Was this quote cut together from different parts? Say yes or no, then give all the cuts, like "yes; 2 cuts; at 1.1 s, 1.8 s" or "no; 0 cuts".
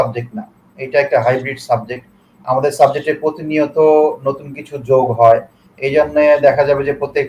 no; 0 cuts